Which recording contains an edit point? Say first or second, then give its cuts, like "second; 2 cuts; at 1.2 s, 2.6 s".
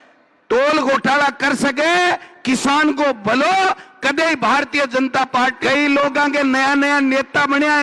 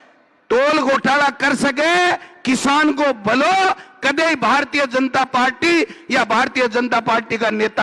first; 1 cut; at 5.6 s